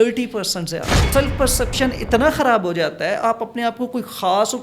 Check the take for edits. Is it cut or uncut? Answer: cut